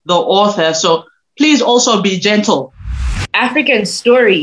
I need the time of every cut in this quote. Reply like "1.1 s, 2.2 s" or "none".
2.8 s